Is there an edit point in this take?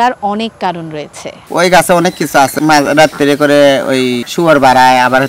yes; 3 cuts; at 1.4 s, 2.5 s, 4.2 s

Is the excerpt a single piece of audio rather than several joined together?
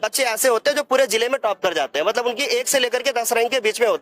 yes; 0 cuts

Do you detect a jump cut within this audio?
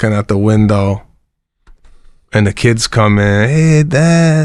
no; 0 cuts

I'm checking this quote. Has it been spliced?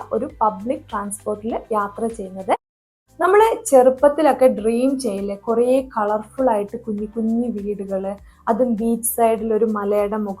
yes; 1 cut; at 2.9 s

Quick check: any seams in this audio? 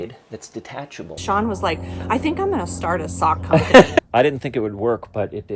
yes; 2 cuts; at 1.2 s, 3.9 s

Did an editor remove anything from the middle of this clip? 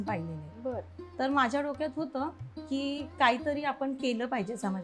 no; 0 cuts

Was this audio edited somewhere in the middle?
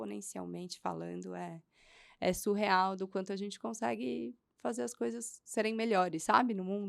no; 0 cuts

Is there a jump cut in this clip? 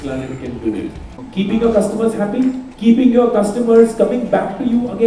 yes; 2 cuts; at 1.2 s, 2.7 s

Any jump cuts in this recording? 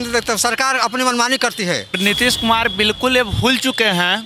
yes; 1 cut; at 2.0 s

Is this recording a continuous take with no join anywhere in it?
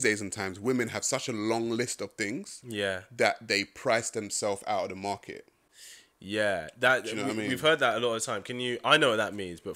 yes; 0 cuts

